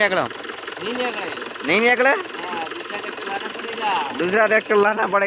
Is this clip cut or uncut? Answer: uncut